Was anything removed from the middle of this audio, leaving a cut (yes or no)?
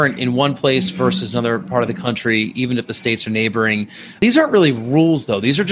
yes